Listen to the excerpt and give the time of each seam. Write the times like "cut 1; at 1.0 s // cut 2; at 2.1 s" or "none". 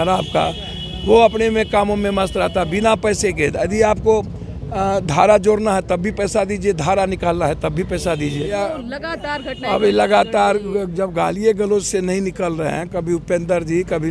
cut 1; at 8.6 s

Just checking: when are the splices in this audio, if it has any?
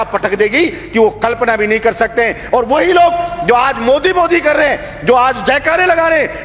none

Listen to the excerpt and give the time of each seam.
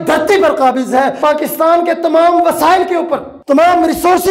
cut 1; at 1.2 s // cut 2; at 3.3 s

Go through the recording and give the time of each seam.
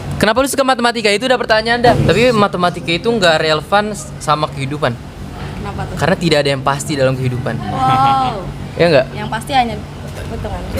cut 1; at 2.0 s

